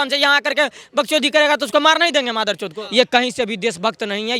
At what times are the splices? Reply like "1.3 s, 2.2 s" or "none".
2.8 s